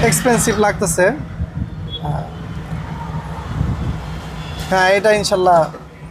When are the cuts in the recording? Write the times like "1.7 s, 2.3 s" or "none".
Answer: none